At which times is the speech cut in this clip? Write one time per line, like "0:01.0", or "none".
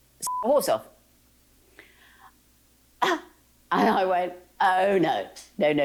none